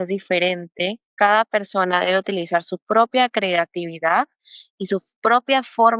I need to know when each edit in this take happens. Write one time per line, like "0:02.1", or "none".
0:01.1